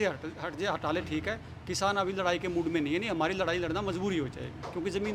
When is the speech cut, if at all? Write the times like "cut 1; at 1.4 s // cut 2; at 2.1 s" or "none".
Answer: none